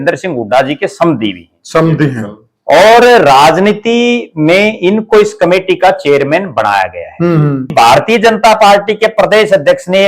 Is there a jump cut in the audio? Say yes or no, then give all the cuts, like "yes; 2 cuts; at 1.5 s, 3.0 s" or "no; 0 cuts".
yes; 1 cut; at 7.7 s